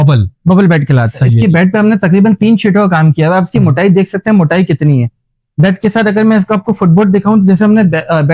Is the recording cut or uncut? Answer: uncut